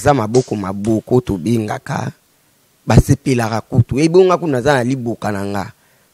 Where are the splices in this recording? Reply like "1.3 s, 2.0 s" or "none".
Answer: none